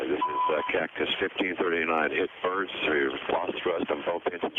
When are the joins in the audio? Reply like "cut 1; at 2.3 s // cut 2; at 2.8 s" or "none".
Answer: none